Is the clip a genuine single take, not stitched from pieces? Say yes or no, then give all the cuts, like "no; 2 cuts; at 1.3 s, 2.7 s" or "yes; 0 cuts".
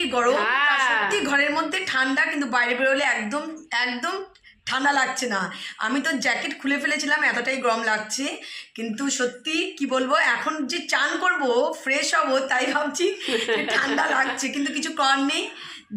yes; 0 cuts